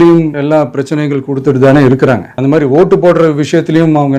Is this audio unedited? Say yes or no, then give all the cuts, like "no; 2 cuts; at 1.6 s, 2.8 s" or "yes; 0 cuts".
no; 1 cut; at 2.3 s